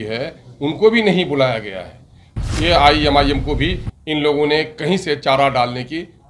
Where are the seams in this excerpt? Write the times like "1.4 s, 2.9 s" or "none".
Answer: 2.3 s